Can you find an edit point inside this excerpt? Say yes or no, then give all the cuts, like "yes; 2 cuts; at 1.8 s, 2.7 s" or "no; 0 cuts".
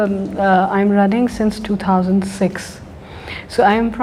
no; 0 cuts